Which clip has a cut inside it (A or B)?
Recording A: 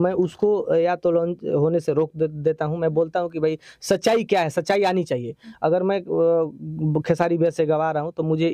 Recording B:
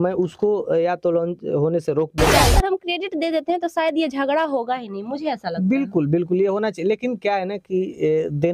B